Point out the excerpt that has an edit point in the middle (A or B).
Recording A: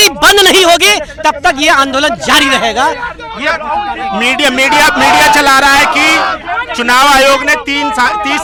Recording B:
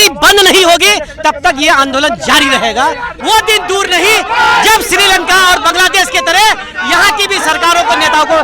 B